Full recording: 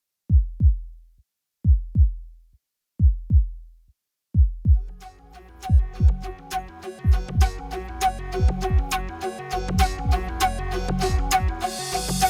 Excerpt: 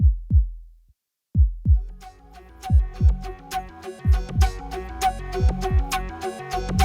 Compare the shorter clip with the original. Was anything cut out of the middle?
yes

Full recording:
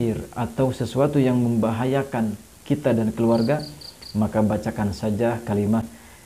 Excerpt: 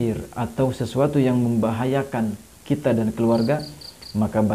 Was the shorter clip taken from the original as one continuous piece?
yes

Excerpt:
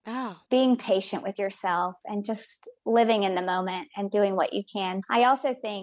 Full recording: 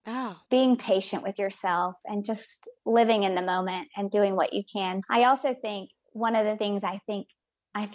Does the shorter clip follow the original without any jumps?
yes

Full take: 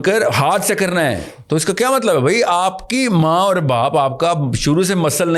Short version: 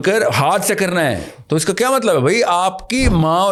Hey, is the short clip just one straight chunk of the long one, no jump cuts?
yes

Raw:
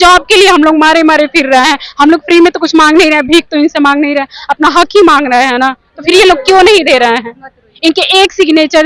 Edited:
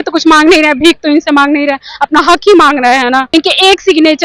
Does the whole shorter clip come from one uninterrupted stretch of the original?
no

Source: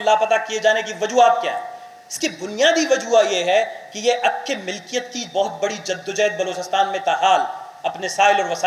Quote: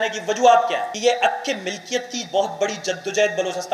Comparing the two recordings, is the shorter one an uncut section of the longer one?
no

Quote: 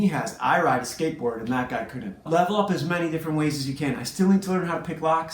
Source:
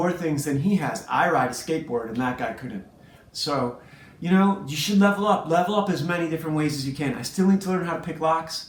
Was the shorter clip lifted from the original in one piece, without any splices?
no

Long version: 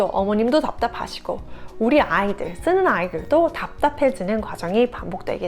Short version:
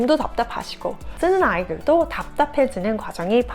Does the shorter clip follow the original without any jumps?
no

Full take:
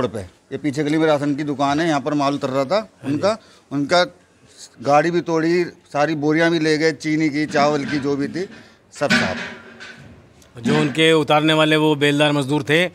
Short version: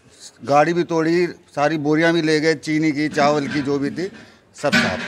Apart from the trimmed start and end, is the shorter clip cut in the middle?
no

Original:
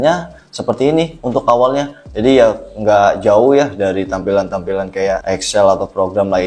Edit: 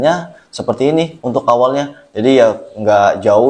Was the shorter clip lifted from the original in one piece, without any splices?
yes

